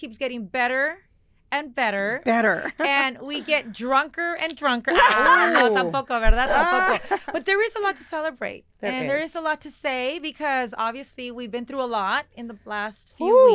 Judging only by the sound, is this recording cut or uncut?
uncut